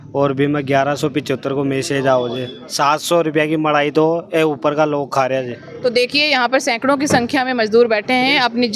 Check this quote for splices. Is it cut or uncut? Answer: cut